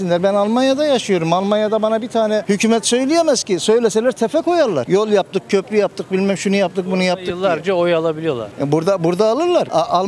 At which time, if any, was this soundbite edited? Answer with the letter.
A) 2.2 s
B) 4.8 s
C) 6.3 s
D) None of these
D